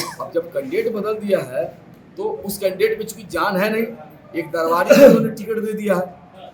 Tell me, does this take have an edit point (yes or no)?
no